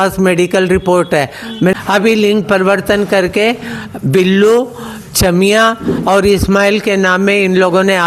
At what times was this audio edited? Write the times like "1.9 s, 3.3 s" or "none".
1.7 s